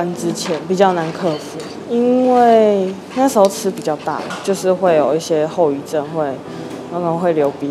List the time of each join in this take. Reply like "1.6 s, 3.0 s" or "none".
4.3 s